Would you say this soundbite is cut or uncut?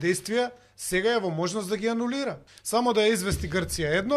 cut